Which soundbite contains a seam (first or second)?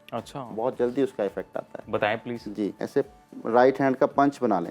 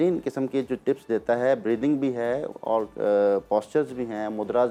first